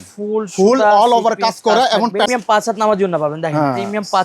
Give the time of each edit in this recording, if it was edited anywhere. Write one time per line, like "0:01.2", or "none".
0:02.4